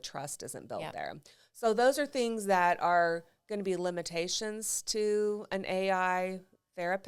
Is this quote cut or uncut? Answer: uncut